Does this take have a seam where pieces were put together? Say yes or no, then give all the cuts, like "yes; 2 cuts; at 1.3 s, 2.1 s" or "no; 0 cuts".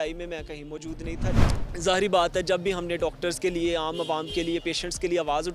yes; 1 cut; at 1.4 s